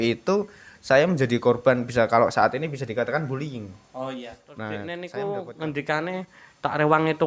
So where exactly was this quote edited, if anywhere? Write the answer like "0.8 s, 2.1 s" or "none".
4.4 s